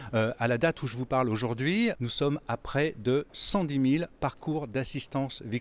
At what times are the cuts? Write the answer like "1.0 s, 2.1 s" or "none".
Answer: 2.0 s